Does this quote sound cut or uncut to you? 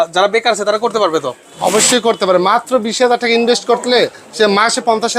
uncut